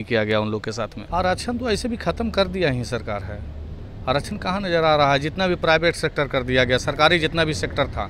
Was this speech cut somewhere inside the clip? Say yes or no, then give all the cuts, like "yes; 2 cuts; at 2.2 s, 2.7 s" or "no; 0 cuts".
yes; 1 cut; at 1.0 s